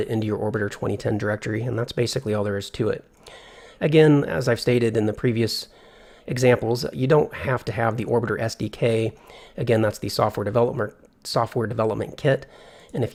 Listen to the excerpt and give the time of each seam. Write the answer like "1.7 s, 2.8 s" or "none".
none